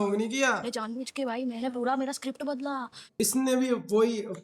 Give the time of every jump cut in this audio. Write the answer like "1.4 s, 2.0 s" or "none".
3.0 s